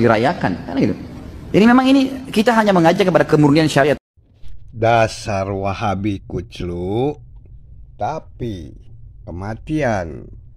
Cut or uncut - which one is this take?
cut